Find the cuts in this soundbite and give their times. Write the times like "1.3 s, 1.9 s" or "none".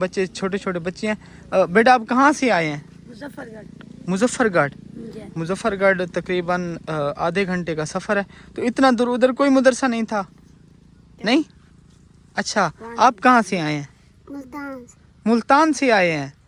none